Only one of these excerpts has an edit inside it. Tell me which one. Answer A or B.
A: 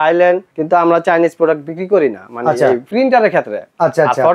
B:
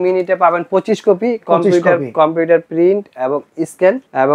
A